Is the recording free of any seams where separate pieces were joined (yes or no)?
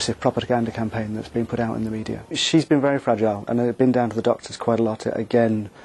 no